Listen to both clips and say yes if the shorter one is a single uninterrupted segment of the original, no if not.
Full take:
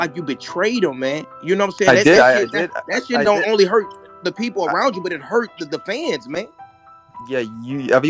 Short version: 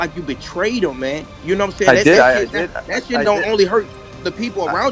yes